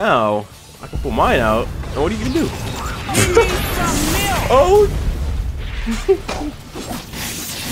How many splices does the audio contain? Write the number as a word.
zero